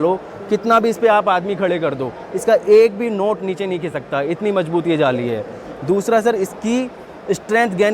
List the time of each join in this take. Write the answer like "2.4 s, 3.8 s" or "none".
none